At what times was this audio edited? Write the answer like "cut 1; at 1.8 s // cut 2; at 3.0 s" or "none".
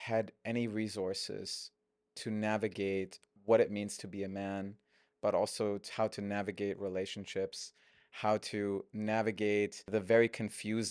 cut 1; at 3.4 s // cut 2; at 9.9 s